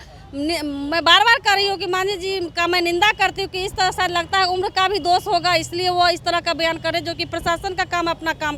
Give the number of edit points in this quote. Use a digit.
0